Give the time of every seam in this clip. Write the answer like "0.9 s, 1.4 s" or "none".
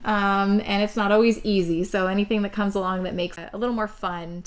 3.3 s